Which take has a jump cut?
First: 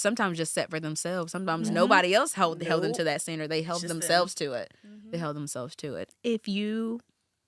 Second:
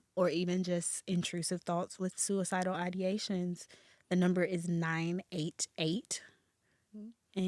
first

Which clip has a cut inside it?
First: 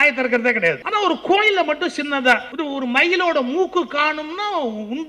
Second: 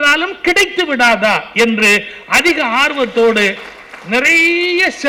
first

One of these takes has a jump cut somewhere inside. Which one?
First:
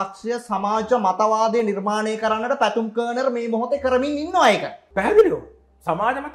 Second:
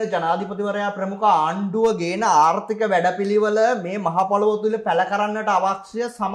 first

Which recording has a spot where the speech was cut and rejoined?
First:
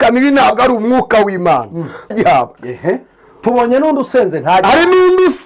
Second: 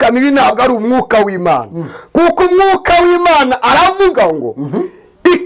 first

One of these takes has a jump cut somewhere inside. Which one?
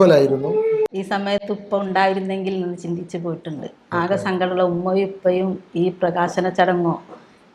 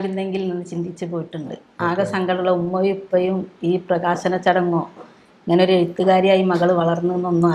first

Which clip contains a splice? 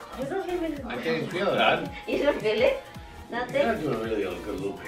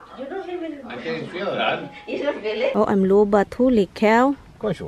second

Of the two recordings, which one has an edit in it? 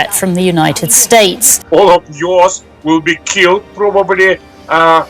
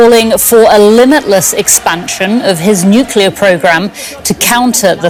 first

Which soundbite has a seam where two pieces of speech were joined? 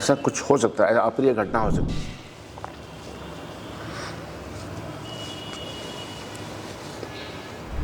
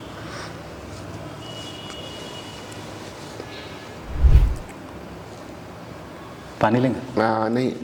first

